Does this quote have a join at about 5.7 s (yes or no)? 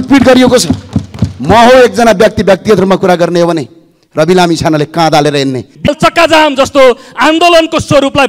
yes